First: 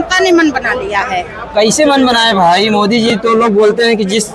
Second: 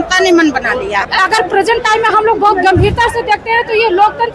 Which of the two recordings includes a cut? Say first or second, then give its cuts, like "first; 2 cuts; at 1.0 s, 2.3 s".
second; 1 cut; at 1.0 s